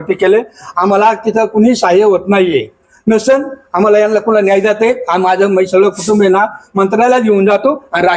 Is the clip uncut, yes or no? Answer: yes